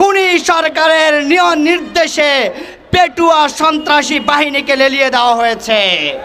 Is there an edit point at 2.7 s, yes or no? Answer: no